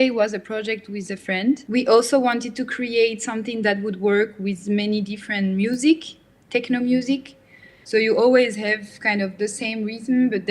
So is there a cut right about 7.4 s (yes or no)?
no